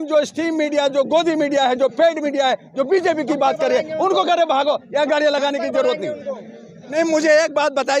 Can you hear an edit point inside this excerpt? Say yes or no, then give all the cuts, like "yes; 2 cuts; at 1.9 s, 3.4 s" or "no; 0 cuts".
yes; 1 cut; at 6.7 s